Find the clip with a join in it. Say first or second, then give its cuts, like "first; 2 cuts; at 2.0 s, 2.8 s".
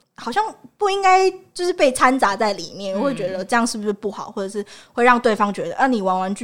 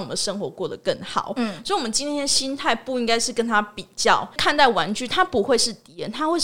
second; 1 cut; at 4.4 s